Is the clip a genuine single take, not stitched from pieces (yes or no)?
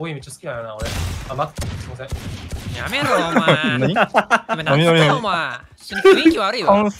yes